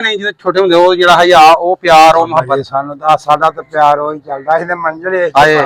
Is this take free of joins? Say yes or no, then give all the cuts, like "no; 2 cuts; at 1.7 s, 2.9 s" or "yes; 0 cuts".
yes; 0 cuts